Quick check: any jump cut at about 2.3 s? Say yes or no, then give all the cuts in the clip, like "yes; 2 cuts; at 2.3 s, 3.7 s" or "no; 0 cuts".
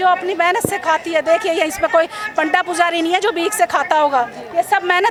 no; 0 cuts